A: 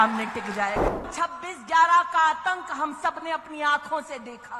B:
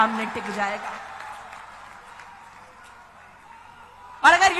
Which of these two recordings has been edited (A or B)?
A